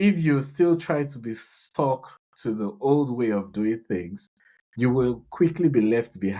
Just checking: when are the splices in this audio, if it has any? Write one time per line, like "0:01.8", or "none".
none